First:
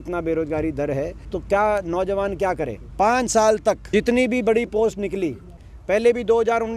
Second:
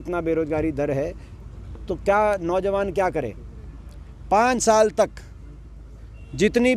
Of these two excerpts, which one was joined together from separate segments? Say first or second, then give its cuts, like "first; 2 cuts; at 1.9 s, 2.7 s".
first; 4 cuts; at 1.3 s, 2.8 s, 3.8 s, 5.5 s